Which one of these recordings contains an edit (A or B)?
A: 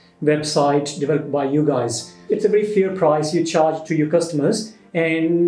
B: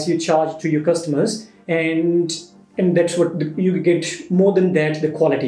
A